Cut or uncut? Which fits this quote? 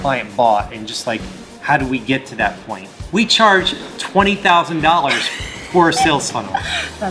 cut